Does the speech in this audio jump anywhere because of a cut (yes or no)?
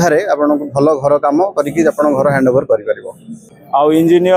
yes